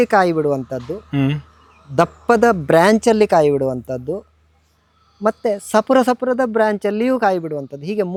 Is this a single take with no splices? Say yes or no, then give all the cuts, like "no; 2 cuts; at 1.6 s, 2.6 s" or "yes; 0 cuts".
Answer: yes; 0 cuts